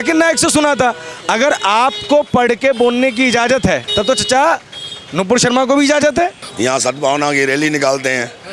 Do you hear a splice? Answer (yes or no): yes